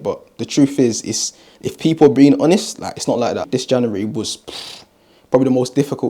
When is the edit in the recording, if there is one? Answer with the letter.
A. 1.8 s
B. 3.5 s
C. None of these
B